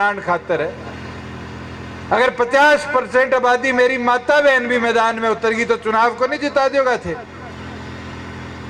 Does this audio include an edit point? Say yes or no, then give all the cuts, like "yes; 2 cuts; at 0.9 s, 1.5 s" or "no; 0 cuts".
no; 0 cuts